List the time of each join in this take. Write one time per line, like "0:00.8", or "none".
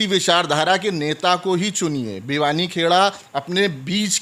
none